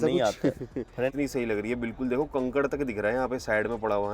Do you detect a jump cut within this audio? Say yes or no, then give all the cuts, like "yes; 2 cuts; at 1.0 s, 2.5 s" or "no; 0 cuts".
yes; 1 cut; at 1.1 s